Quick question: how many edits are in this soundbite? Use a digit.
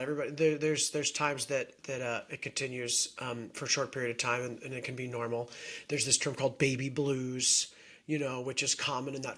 0